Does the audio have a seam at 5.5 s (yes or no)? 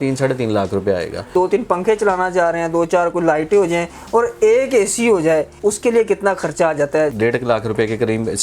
yes